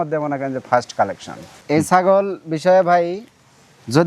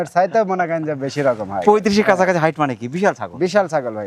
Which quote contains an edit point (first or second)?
first